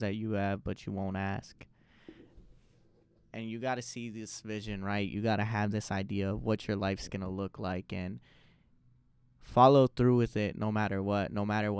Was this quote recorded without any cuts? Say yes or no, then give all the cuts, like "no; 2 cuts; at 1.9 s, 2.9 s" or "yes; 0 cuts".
yes; 0 cuts